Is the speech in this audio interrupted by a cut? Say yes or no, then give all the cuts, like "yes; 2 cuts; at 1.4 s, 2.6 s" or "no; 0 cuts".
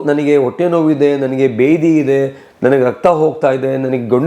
no; 0 cuts